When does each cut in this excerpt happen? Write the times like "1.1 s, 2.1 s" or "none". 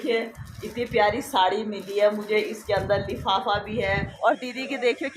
4.1 s